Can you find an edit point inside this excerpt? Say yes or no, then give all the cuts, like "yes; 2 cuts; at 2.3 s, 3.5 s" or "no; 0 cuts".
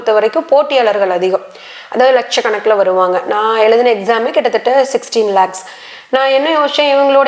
no; 0 cuts